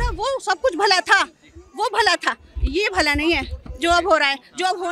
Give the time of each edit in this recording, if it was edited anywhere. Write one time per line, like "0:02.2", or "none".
none